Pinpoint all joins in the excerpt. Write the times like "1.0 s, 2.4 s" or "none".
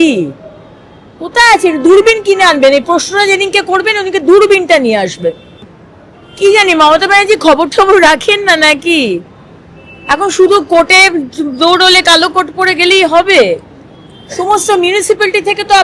5.5 s